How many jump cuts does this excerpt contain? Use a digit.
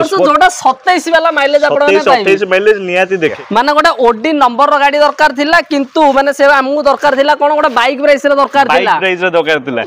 1